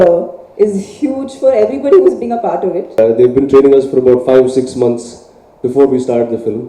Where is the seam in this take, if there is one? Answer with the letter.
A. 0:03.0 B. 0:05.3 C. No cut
A